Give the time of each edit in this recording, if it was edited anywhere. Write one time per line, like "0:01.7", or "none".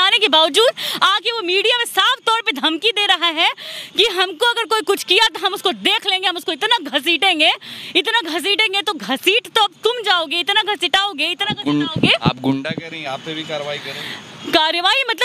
none